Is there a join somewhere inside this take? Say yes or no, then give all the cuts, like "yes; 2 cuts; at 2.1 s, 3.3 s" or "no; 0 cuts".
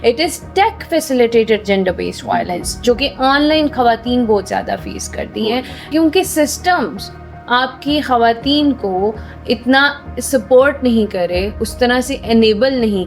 yes; 1 cut; at 5.9 s